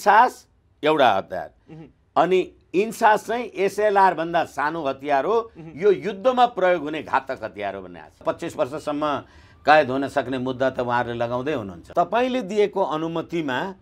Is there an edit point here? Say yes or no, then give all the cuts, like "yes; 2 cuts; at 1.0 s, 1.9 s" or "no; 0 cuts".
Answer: yes; 2 cuts; at 8.2 s, 11.8 s